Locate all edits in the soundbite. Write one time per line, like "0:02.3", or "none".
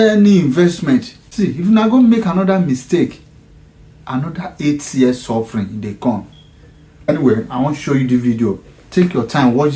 0:01.2
0:07.1

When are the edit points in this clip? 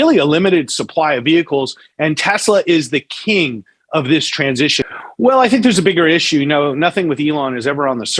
0:04.9

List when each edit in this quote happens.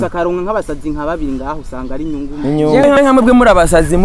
0:02.9

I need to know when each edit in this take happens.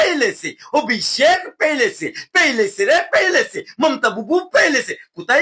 none

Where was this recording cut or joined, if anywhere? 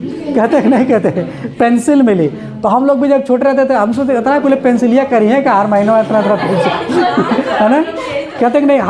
none

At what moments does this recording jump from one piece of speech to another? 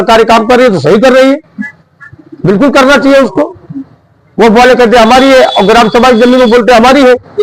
none

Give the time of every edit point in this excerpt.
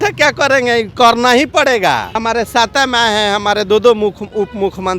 0:02.2

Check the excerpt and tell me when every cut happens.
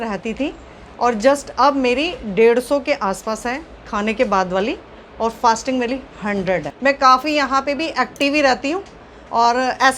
0:06.7

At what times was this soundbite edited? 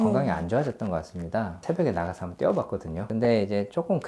0:01.6
0:03.0

